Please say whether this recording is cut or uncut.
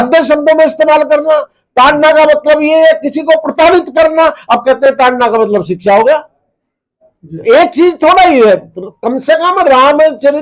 uncut